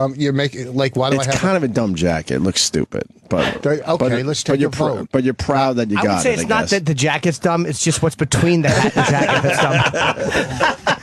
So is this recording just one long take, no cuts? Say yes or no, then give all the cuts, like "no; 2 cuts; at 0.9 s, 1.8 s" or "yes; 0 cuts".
yes; 0 cuts